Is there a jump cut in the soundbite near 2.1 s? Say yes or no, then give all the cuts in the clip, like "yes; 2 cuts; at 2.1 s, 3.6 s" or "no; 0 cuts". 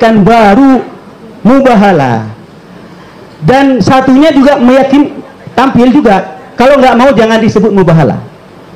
no; 0 cuts